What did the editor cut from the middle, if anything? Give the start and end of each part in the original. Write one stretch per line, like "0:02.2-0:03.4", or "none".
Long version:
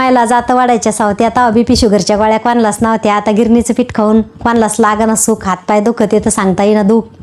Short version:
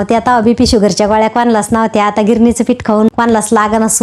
0:04.2-0:04.4

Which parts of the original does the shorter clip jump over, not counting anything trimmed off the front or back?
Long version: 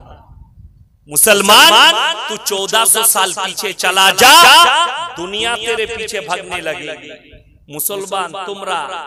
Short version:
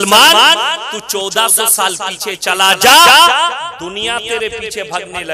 none

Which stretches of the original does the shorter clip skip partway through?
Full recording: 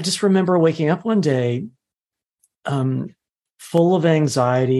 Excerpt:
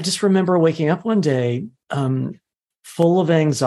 0:01.8-0:02.5

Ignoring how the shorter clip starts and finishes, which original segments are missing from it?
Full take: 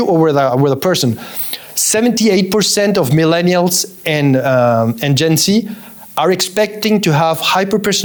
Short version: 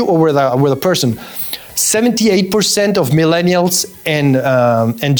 none

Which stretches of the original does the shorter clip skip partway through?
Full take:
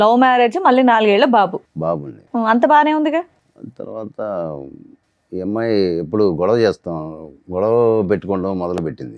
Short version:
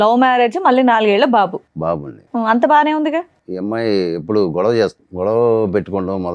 0:03.4-0:05.3
0:06.9-0:07.4

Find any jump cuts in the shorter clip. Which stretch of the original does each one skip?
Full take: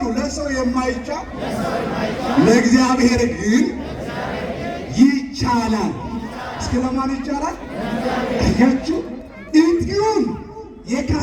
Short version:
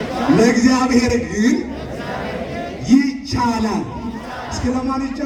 none

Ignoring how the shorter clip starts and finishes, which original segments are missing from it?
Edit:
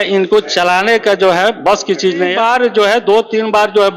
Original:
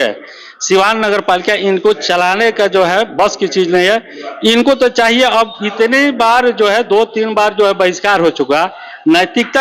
0:03.9-0:06.2

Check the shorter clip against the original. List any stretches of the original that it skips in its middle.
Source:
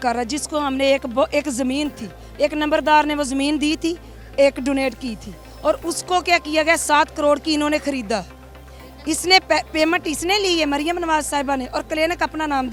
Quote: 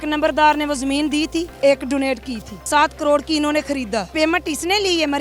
0:04.0-0:04.3
0:05.4-0:06.8
0:08.3-0:09.7

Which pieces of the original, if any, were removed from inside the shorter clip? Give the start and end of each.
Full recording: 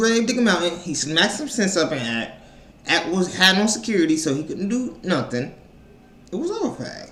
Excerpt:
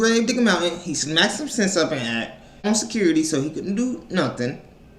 0:02.6-0:03.6

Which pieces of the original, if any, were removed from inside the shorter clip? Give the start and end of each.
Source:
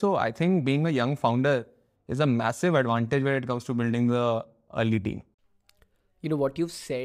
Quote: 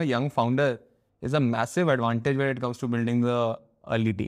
none

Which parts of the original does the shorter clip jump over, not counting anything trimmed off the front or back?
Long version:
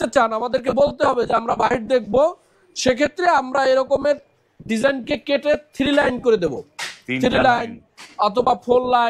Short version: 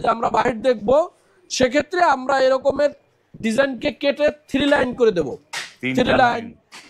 none

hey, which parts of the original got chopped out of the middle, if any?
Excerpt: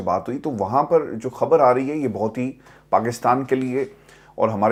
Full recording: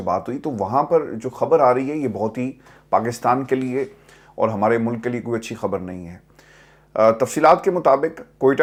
none

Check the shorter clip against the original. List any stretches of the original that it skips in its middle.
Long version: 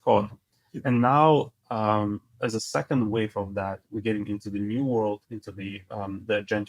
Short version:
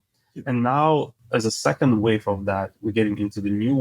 0:01.6-0:02.3

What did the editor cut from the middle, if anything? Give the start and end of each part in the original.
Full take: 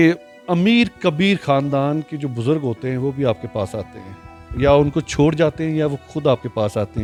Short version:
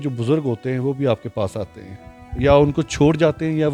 none

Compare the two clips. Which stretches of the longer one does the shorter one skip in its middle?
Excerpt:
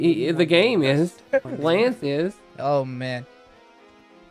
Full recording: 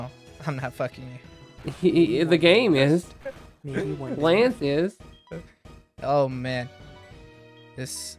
0:03.4-0:04.1
0:05.0-0:05.9

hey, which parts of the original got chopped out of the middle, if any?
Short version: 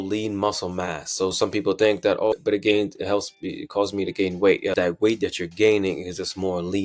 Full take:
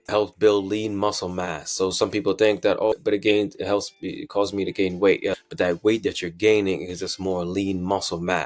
0:05.3-0:05.6

